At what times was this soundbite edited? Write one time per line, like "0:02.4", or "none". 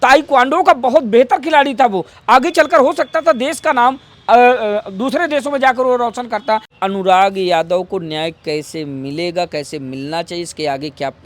0:06.7